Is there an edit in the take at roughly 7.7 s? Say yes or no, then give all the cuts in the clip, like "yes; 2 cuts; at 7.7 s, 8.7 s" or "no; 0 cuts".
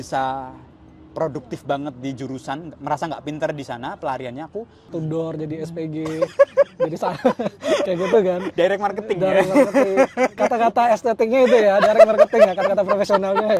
no; 1 cut; at 4.9 s